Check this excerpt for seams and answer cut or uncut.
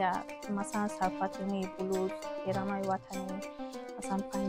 uncut